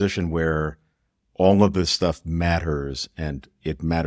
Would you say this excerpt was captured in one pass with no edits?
yes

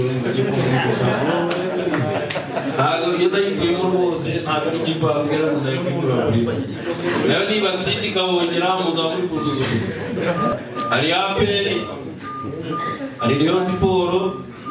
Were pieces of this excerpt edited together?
yes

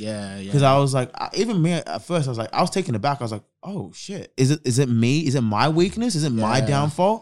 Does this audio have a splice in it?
yes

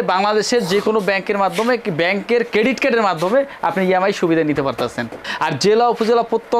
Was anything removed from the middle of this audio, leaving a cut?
yes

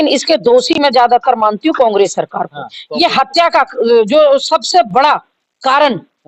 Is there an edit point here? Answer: no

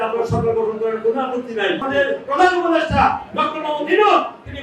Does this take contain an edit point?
yes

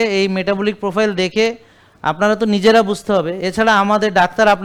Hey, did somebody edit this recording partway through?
no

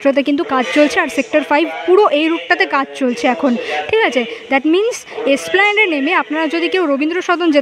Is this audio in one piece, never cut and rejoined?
yes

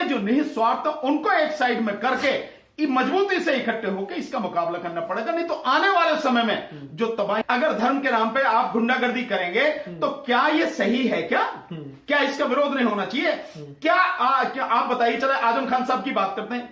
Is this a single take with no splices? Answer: no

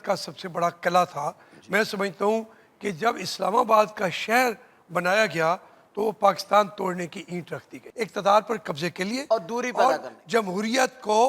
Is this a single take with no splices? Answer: no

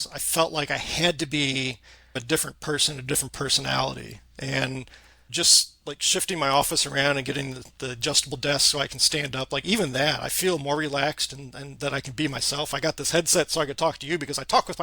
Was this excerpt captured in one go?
no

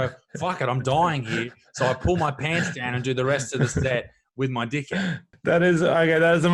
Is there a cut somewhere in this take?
yes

